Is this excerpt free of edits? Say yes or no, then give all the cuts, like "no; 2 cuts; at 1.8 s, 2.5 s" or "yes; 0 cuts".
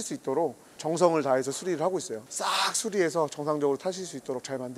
no; 1 cut; at 2.2 s